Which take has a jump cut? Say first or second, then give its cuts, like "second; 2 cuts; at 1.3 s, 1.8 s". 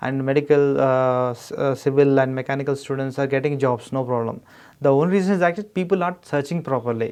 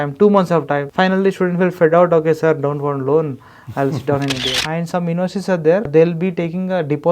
second; 3 cuts; at 0.9 s, 4.4 s, 5.9 s